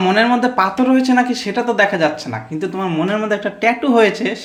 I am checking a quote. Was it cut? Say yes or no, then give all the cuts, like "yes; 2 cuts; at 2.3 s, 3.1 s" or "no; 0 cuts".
no; 0 cuts